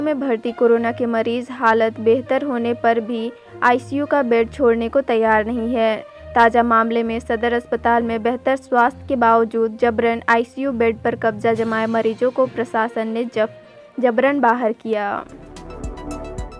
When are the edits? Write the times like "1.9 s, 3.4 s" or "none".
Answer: 15.7 s